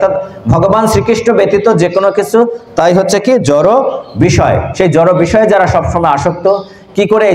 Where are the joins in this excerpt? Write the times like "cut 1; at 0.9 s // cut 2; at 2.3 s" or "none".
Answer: none